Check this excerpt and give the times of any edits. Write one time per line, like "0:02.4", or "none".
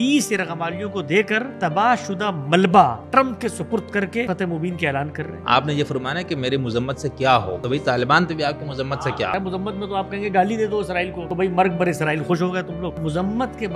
0:01.5
0:03.0
0:04.3
0:05.4
0:07.6
0:09.0
0:11.2
0:13.0